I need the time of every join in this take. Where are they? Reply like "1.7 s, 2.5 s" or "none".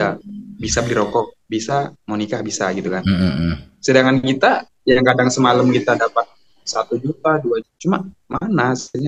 none